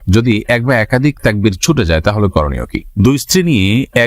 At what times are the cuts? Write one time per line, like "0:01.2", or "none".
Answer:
0:02.8